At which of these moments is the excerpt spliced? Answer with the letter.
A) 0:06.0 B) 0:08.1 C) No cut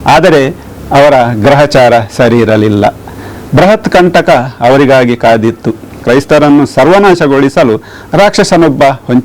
A